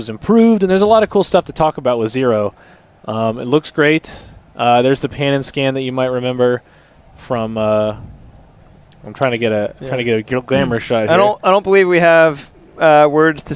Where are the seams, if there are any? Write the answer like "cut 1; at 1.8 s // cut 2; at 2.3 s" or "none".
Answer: cut 1; at 7.2 s